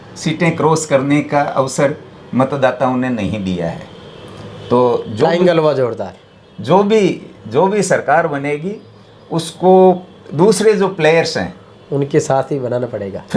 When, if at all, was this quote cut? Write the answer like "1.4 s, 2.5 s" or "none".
none